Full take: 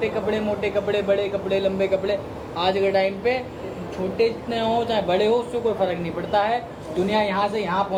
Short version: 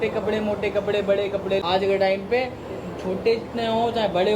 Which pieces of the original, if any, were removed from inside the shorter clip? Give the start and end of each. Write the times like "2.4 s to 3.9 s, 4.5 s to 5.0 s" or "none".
1.6 s to 2.5 s

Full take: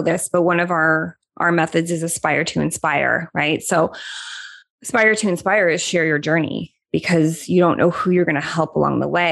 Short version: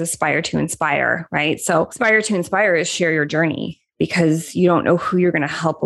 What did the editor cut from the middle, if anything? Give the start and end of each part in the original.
3.9 s to 4.9 s

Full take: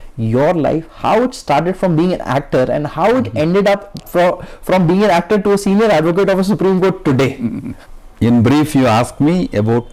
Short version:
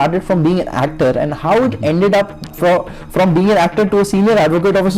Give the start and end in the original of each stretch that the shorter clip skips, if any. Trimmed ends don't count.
none

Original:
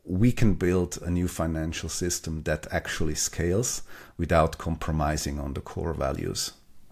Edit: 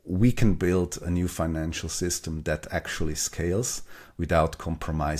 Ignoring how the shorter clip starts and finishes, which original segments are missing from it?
none

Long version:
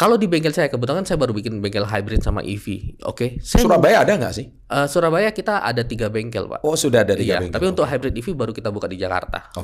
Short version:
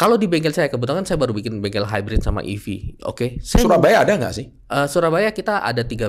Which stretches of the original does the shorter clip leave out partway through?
none

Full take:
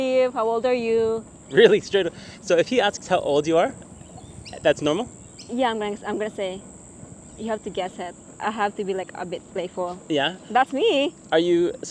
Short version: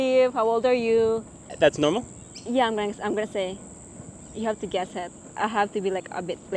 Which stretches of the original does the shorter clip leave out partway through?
1.3 s to 4.4 s

